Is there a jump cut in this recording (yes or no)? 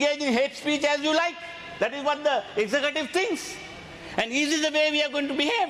no